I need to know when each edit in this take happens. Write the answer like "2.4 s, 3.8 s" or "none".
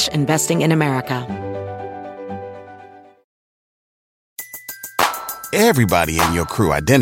1.2 s